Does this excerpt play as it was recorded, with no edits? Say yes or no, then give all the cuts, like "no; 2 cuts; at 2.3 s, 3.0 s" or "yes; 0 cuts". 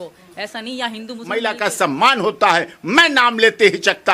no; 1 cut; at 1.4 s